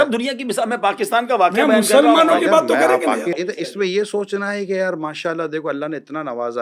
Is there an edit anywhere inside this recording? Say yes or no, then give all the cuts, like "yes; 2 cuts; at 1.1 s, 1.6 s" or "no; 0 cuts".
no; 0 cuts